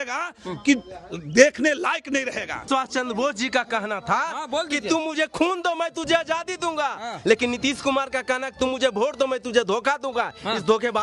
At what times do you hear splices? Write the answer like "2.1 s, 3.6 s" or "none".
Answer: 2.6 s